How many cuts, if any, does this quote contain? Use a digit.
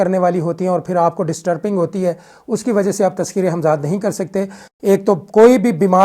1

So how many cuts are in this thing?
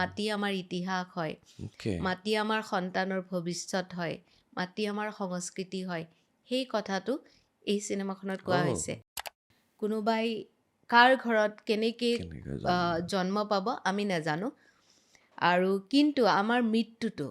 1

